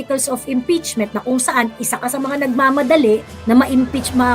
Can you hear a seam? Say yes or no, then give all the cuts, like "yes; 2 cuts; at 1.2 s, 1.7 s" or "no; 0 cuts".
no; 0 cuts